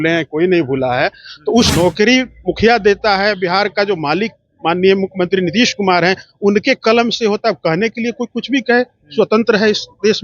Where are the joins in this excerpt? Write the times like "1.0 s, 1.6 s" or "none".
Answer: 1.7 s

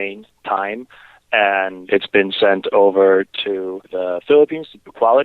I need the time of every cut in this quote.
1.8 s, 3.3 s

